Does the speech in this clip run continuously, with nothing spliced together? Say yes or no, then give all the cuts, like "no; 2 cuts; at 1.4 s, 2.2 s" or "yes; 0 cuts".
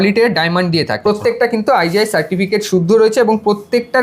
no; 1 cut; at 1.1 s